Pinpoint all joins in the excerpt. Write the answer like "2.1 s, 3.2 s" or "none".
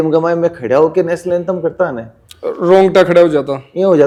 none